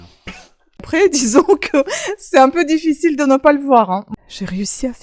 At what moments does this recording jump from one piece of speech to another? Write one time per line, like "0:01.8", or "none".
0:00.8
0:04.1